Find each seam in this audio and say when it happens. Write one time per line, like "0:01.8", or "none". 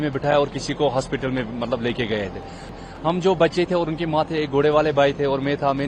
0:02.7